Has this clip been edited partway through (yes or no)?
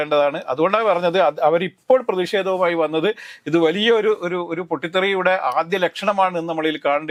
no